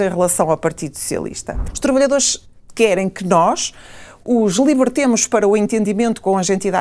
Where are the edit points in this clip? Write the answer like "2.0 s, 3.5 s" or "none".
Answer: 1.7 s